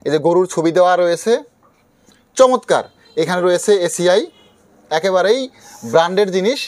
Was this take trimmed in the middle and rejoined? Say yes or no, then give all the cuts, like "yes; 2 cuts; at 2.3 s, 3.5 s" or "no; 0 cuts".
no; 0 cuts